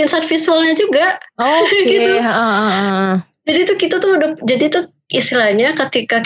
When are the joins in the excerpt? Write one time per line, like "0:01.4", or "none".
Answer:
none